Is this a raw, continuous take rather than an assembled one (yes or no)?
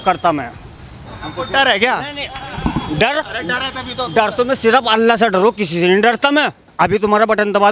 no